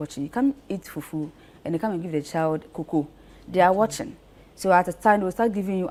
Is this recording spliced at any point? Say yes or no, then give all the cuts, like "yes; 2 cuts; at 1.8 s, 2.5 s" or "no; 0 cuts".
no; 0 cuts